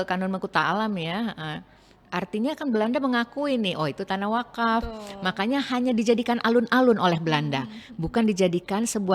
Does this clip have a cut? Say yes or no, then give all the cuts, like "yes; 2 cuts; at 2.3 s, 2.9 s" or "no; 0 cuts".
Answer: no; 0 cuts